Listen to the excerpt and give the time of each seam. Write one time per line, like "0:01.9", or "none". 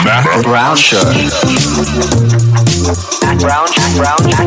none